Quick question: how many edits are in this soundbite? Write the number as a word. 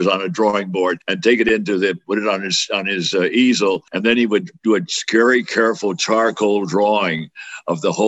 one